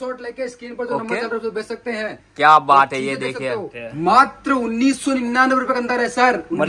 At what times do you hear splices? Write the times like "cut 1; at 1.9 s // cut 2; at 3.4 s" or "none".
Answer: cut 1; at 3.8 s